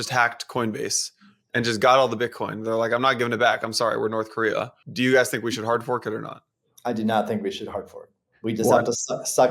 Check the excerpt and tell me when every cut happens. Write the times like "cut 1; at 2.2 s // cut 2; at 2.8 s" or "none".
cut 1; at 4.8 s